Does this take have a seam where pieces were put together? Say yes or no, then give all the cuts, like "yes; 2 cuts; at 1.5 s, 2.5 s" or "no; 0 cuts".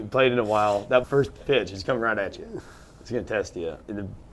yes; 1 cut; at 1.0 s